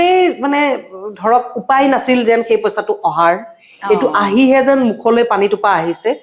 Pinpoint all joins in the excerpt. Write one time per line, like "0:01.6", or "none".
none